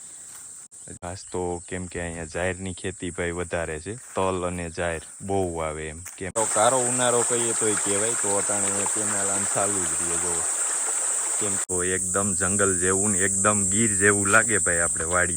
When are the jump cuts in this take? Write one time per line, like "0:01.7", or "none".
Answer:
0:01.0
0:06.4
0:11.6